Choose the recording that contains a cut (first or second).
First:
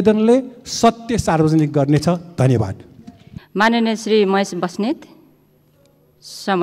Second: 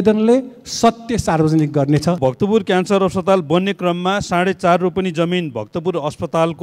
second